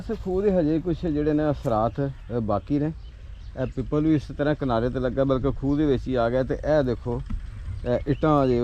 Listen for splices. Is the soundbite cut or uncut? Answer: uncut